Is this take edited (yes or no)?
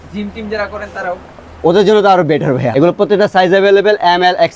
yes